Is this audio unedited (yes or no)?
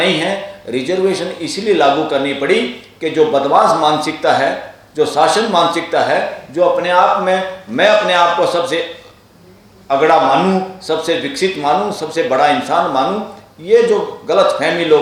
yes